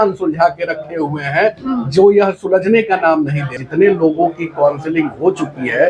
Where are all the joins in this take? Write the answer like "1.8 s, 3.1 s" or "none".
3.5 s